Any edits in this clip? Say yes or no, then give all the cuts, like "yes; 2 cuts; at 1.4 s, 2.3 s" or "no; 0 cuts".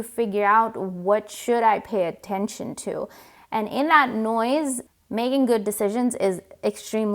yes; 1 cut; at 4.8 s